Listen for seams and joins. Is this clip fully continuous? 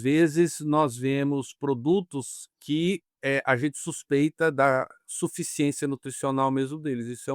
no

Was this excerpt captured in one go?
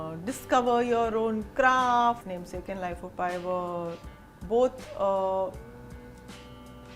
no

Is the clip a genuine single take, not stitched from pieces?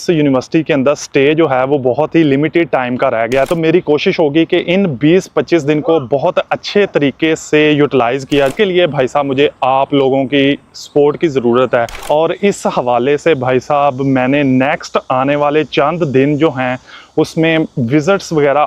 no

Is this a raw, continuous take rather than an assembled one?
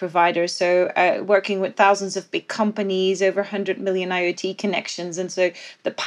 yes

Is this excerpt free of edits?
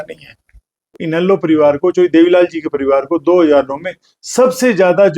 no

